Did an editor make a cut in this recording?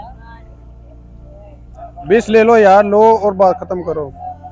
no; 0 cuts

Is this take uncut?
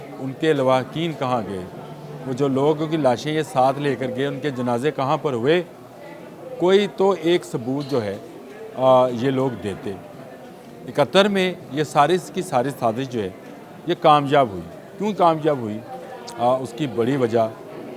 yes; 0 cuts

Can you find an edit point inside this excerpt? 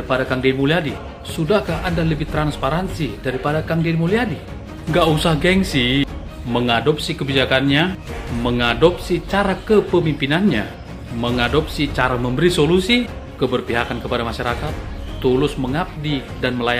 no; 0 cuts

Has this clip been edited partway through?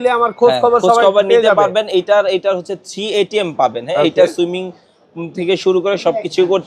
no; 0 cuts

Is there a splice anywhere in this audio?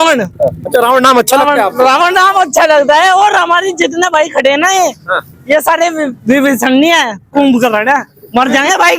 no; 0 cuts

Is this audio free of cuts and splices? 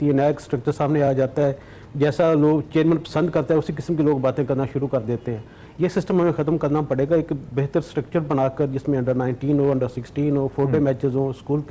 yes; 0 cuts

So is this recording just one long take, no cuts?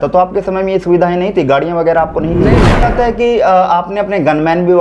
no; 1 cut; at 2.9 s

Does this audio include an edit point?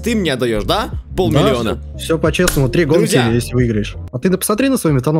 yes; 1 cut; at 4.0 s

